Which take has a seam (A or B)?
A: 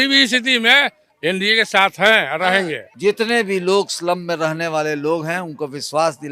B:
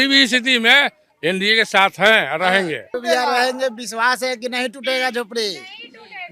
A